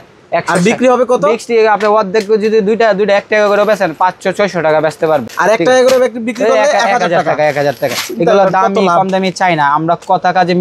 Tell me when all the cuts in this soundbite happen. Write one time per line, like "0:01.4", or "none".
none